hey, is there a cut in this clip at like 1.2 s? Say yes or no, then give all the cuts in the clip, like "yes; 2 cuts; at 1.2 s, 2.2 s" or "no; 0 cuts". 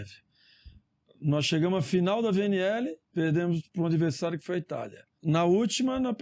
no; 2 cuts; at 3.0 s, 5.1 s